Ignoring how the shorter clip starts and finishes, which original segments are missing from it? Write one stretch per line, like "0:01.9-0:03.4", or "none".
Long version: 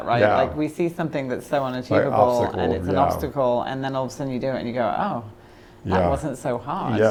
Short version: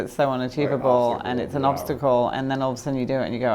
none